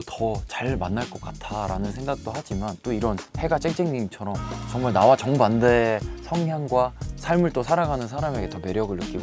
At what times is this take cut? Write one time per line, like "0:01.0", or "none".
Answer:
none